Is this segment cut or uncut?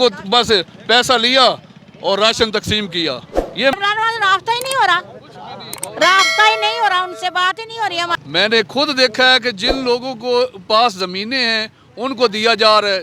cut